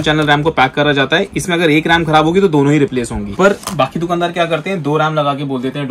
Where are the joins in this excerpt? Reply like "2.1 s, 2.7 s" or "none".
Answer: 3.3 s